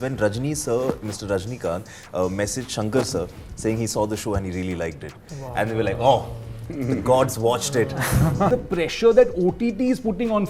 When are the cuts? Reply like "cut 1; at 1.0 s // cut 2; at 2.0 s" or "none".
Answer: cut 1; at 8.5 s